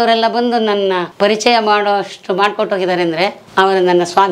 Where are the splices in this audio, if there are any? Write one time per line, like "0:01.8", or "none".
0:01.1
0:03.4